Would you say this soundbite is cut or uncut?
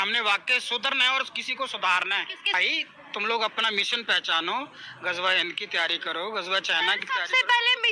cut